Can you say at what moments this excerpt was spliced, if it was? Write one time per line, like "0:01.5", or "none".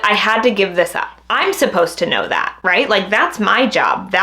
0:01.1